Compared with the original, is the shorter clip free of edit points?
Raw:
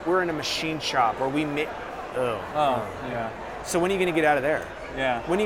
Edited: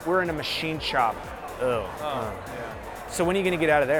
no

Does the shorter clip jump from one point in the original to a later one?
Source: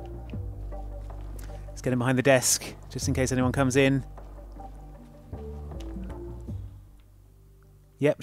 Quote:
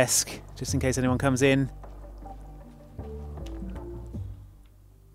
no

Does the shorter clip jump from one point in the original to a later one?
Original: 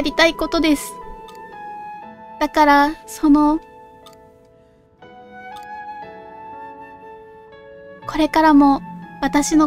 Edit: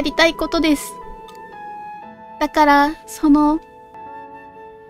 yes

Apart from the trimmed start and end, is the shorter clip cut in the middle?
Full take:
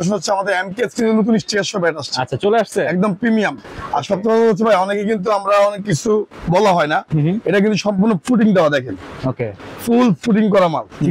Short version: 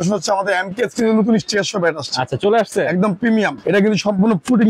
yes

